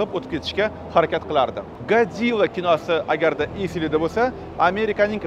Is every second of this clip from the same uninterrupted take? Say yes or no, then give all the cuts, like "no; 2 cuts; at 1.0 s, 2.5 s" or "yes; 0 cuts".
no; 1 cut; at 1.7 s